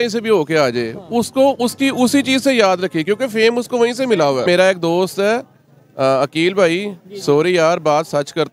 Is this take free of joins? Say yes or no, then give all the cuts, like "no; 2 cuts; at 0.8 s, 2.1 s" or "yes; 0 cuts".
no; 1 cut; at 4.4 s